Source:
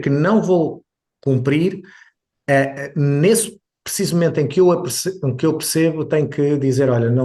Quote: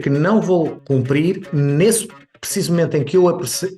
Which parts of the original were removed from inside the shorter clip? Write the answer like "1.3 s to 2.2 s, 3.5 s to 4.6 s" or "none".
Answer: 1.2 s to 2.7 s